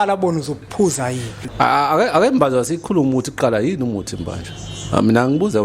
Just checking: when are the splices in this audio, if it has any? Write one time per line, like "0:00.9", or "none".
0:01.4